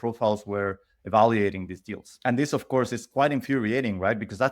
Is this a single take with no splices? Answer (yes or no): no